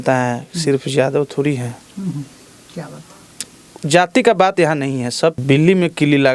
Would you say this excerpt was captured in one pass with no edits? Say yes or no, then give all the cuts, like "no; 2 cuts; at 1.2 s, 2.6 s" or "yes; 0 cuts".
no; 1 cut; at 5.4 s